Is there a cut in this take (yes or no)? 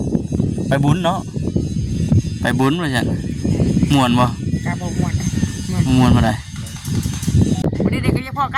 yes